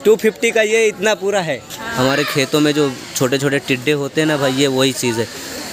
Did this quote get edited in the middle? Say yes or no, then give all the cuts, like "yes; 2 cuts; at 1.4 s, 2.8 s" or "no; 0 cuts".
yes; 1 cut; at 1.8 s